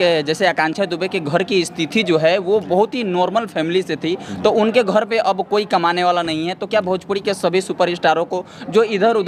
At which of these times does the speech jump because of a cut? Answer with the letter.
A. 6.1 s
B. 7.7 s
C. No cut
C